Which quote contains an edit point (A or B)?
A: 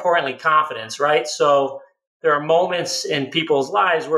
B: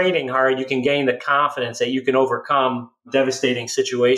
B